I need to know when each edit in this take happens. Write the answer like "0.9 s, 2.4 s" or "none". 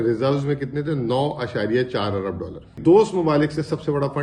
2.8 s